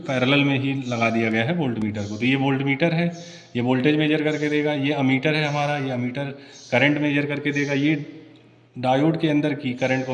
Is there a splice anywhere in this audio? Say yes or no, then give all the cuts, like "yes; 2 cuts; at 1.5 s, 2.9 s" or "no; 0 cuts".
no; 0 cuts